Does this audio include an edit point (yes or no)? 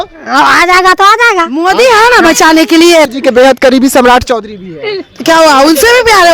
yes